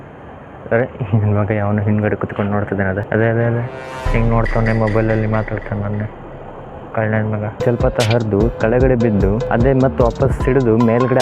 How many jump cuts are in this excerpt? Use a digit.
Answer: 2